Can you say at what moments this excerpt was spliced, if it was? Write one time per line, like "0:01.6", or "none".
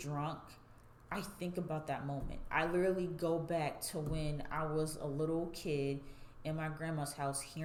none